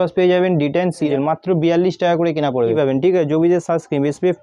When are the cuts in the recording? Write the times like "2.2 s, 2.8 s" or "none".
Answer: 1.1 s, 2.8 s

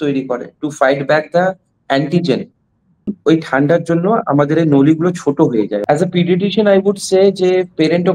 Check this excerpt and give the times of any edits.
3.2 s, 5.8 s

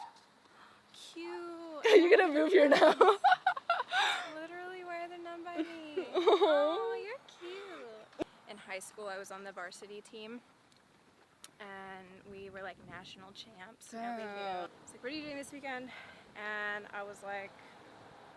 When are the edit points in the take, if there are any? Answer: 8.2 s, 14.7 s

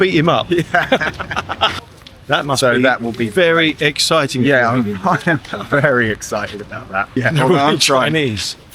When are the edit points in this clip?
1.7 s, 7.1 s

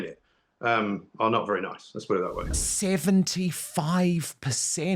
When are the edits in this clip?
2.6 s

